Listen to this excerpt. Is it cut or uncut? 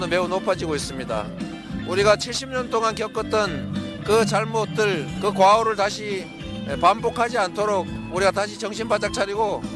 uncut